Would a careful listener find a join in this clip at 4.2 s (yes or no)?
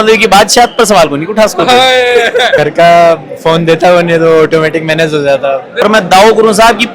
no